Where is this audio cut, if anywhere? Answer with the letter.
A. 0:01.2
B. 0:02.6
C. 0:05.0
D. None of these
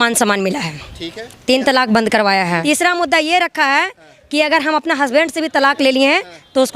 B